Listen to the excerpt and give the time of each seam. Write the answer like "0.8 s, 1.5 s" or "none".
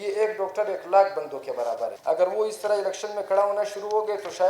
1.9 s